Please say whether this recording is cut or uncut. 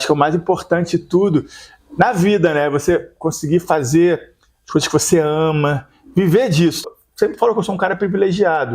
cut